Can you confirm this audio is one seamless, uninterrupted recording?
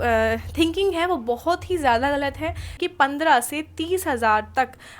no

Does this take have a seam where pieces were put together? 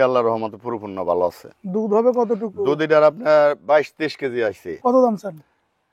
yes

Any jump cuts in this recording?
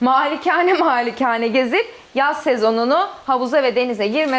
no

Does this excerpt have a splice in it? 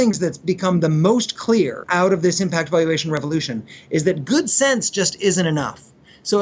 yes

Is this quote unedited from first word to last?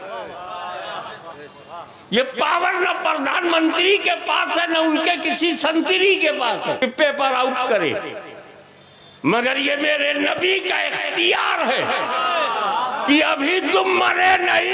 no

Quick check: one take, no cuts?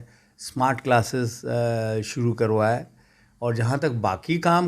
yes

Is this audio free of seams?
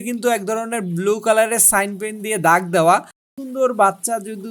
no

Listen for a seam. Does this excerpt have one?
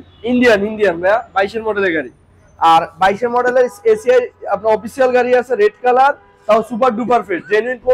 no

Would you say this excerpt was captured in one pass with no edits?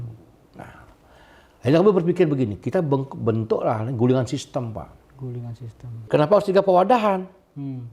no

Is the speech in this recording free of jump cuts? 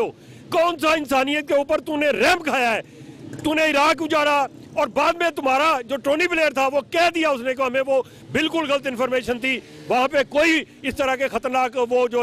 yes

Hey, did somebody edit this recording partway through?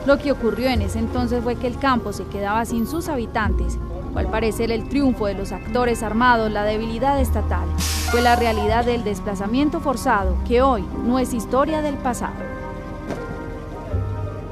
no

